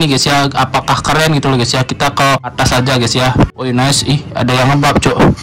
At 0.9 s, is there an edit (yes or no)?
no